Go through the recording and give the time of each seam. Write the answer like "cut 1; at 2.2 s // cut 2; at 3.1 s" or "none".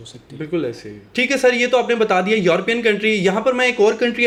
none